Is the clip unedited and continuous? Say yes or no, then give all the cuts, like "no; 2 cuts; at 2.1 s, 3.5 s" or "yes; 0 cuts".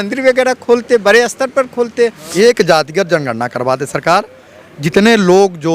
no; 1 cut; at 2.2 s